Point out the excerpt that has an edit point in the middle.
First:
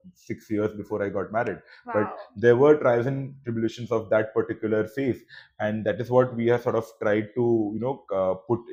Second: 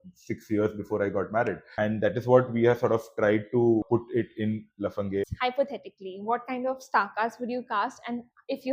second; 3 cuts; at 1.6 s, 3.9 s, 5.3 s

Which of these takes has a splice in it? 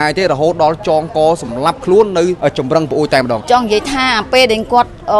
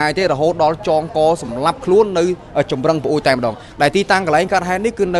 first; 2 cuts; at 2.4 s, 3.4 s

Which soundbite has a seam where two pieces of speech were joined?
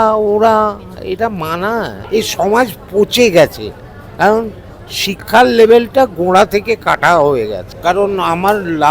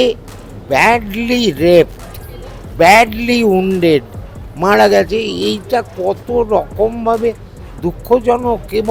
first; 2 cuts; at 2.0 s, 7.7 s

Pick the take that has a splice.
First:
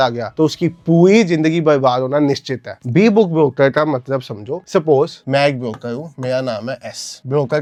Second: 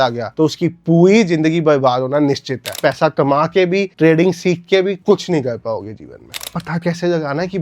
second; 2 cuts; at 2.8 s, 6.5 s

